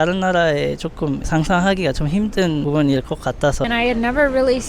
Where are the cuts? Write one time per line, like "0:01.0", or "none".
0:03.6